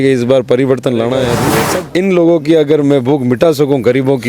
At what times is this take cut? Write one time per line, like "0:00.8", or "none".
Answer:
0:01.8